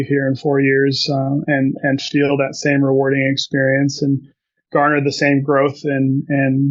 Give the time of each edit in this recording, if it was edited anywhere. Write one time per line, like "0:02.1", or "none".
none